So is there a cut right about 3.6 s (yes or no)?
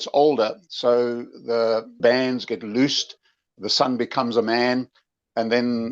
no